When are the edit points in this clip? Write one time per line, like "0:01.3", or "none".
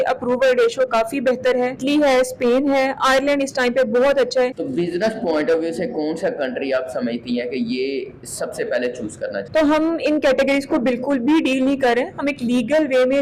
0:01.8
0:04.6
0:09.4